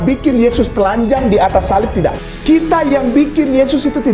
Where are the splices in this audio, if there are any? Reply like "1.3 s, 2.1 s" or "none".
2.3 s